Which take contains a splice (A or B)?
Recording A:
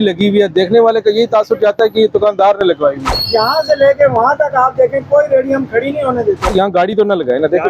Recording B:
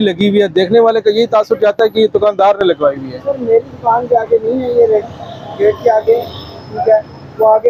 A